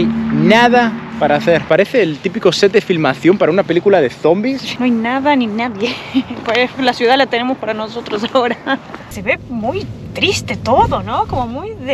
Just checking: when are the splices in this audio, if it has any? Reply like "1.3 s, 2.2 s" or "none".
1.6 s, 4.7 s, 9.0 s

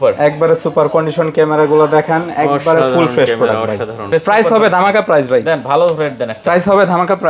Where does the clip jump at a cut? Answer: 4.1 s

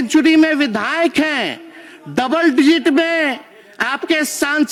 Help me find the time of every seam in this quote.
none

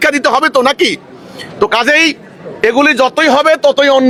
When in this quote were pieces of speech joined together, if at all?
none

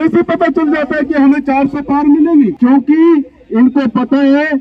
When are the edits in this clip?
2.5 s

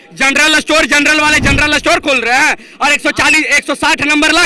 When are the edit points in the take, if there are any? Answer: none

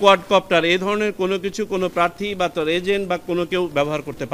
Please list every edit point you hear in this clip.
none

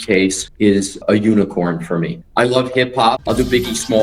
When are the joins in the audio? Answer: 0.9 s, 2.2 s, 3.2 s

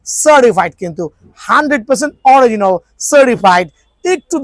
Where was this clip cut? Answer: none

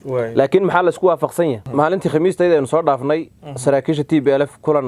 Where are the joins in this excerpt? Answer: 1.6 s

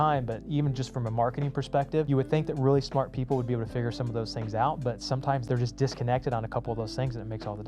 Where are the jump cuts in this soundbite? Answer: 2.1 s, 5.4 s

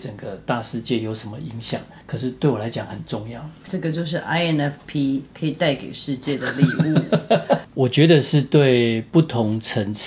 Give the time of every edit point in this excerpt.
2.0 s, 3.6 s, 7.7 s, 9.0 s

